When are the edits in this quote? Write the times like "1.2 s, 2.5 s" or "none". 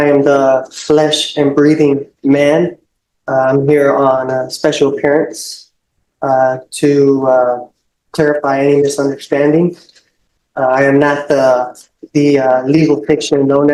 none